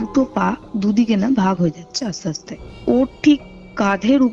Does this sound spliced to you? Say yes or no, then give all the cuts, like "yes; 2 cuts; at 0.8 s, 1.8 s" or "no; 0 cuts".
yes; 1 cut; at 3.1 s